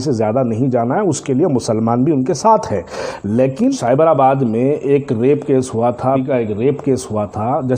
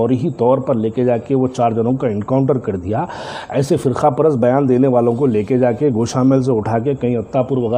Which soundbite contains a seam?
first; 2 cuts; at 3.8 s, 6.2 s

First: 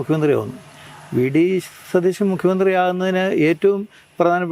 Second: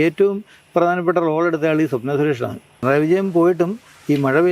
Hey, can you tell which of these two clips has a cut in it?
second; 1 cut; at 2.8 s

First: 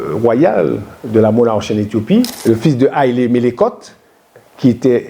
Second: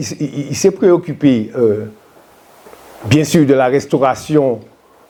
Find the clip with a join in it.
first; 1 cut; at 2.3 s

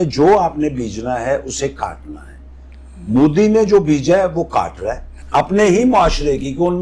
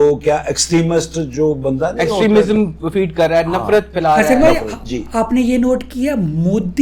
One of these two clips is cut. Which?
first; 1 cut; at 5.1 s

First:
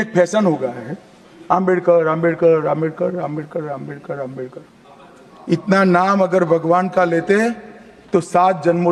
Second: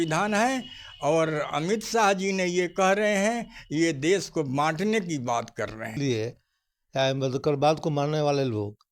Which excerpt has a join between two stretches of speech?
second; 1 cut; at 6.0 s

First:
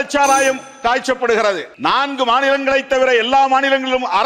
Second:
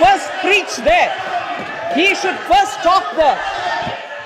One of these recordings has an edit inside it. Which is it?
first; 1 cut; at 1.7 s

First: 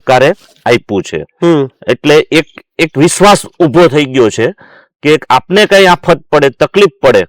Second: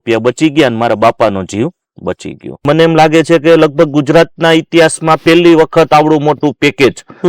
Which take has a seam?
second; 1 cut; at 2.6 s

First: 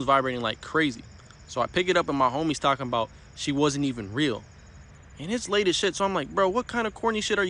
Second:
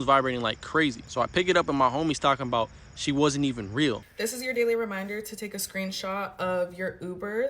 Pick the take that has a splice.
second; 2 cuts; at 1.0 s, 4.1 s

